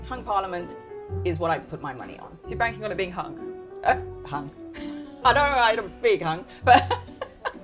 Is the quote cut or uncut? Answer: uncut